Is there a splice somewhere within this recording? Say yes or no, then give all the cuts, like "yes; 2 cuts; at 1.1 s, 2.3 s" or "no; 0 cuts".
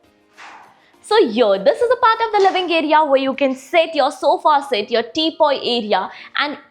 no; 0 cuts